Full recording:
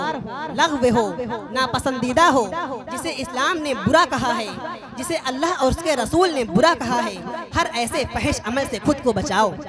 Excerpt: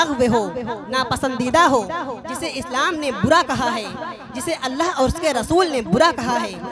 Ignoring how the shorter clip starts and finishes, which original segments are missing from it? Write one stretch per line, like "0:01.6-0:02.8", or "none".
none